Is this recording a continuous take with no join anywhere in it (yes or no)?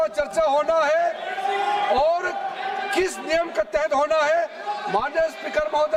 yes